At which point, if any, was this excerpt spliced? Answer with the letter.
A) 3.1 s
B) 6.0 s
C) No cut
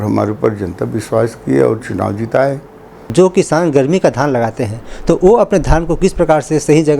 A